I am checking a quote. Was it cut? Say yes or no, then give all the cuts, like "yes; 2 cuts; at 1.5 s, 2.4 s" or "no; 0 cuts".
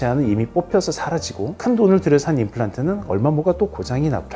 no; 0 cuts